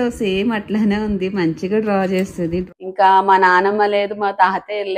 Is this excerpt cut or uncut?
cut